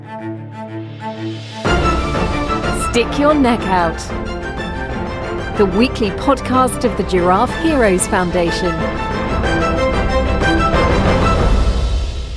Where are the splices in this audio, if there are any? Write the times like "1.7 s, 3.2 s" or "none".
none